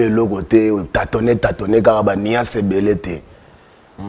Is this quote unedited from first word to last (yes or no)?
yes